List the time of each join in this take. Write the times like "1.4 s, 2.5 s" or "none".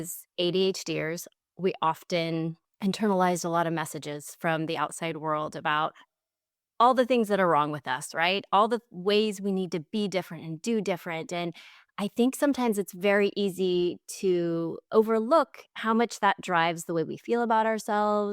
2.6 s, 14.8 s

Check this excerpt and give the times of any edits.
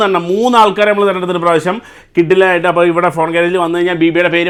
none

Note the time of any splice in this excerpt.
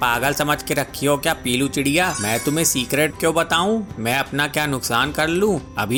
none

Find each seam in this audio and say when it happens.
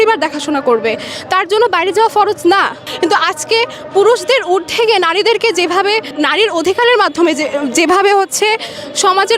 2.8 s, 6.1 s

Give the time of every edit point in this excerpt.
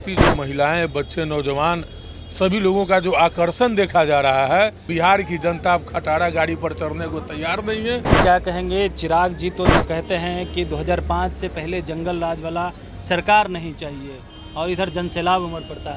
4.9 s, 8.1 s

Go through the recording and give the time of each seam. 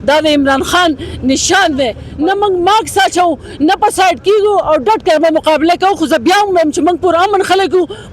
2.0 s

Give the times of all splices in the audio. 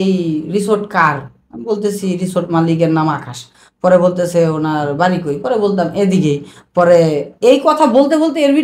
none

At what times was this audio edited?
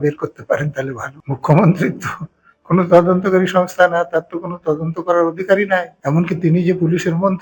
1.1 s, 5.9 s

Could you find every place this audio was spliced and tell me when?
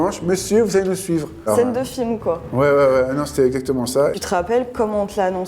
1.5 s, 4.1 s

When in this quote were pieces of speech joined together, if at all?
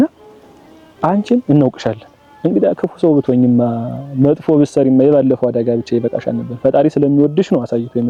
none

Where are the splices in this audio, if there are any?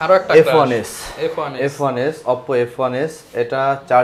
none

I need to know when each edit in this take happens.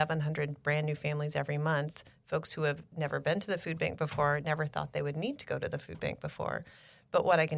none

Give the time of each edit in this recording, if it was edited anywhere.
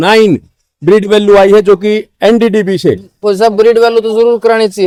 none

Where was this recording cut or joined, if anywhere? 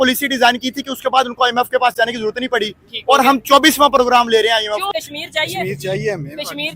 4.9 s

